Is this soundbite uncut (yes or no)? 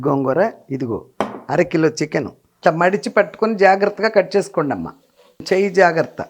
no